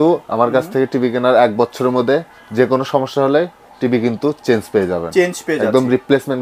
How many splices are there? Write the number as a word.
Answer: zero